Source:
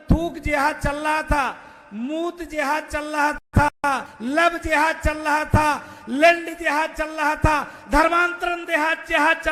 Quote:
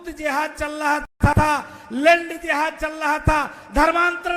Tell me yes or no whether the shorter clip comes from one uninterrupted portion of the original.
no